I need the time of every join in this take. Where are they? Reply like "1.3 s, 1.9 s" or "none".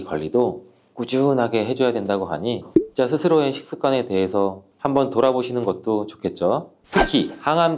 6.8 s